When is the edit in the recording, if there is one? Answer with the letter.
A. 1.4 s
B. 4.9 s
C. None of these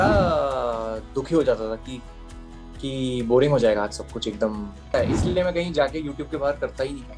B